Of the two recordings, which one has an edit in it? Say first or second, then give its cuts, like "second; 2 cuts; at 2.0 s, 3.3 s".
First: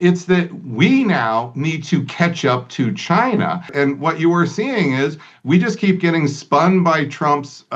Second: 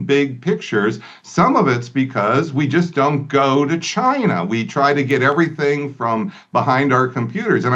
first; 1 cut; at 3.7 s